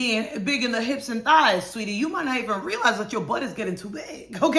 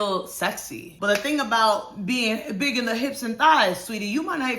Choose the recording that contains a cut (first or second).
second